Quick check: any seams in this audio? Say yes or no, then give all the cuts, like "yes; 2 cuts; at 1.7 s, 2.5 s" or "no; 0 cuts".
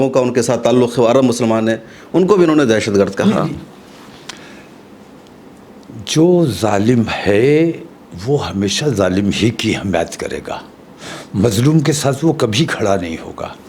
no; 0 cuts